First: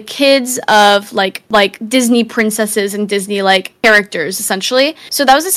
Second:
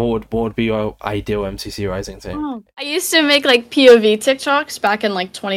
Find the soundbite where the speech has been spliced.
second; 1 cut; at 2.9 s

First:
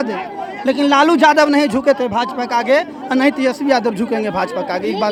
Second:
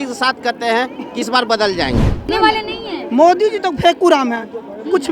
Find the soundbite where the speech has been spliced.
second; 1 cut; at 2.2 s

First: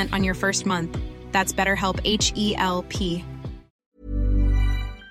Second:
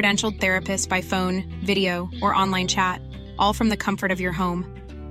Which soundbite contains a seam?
first; 1 cut; at 3.7 s

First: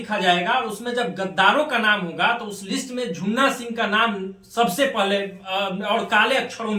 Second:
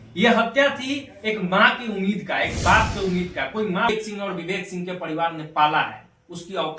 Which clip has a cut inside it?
second; 1 cut; at 3.9 s

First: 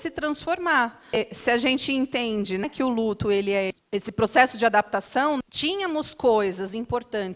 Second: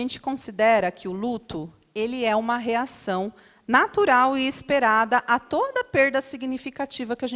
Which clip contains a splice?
first; 4 cuts; at 1.2 s, 2.6 s, 3.7 s, 5.4 s

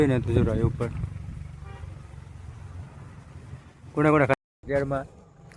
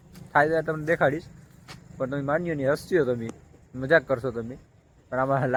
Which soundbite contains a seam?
first; 1 cut; at 4.3 s

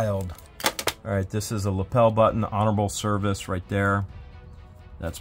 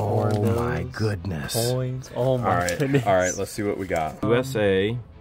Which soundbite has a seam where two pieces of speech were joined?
second; 1 cut; at 4.2 s

